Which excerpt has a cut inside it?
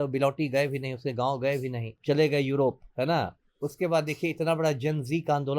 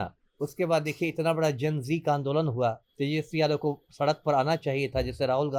first; 1 cut; at 1.9 s

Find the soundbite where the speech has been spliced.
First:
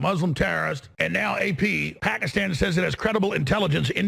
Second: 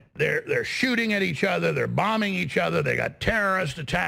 first; 2 cuts; at 0.9 s, 1.9 s

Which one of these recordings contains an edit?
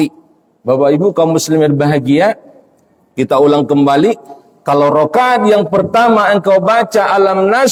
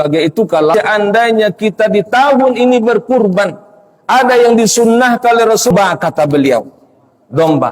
second; 2 cuts; at 0.7 s, 5.7 s

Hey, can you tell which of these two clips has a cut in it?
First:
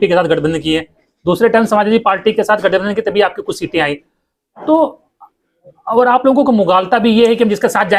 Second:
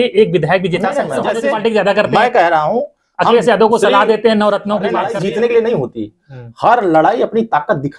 second; 2 cuts; at 1.2 s, 5.1 s

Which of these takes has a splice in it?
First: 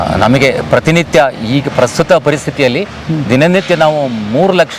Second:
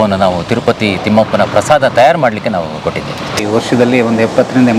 second; 1 cut; at 3.4 s

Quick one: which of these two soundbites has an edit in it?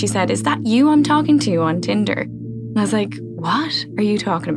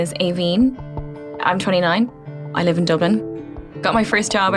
second; 3 cuts; at 0.8 s, 2.2 s, 3.3 s

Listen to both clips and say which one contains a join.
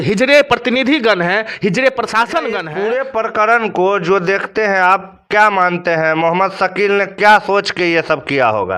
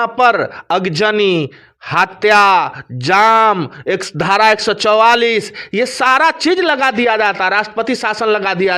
first; 1 cut; at 2.7 s

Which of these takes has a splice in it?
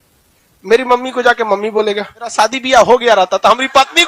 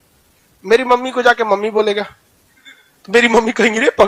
first; 1 cut; at 2.3 s

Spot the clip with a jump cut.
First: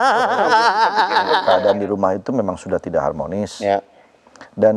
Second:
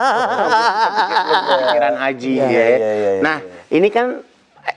first; 1 cut; at 1.4 s

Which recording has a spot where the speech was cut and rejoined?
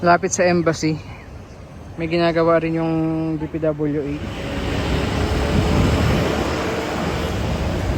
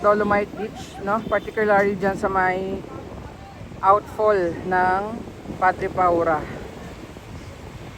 first; 1 cut; at 4.4 s

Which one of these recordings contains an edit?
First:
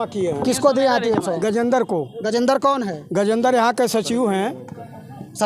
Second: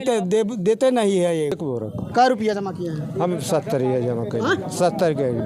second; 1 cut; at 1.6 s

